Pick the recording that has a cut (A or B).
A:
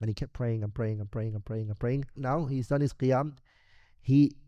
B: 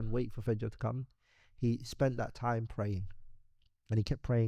A